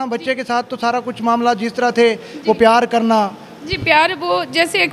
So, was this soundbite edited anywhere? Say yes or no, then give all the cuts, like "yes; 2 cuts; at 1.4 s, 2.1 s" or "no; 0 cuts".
no; 0 cuts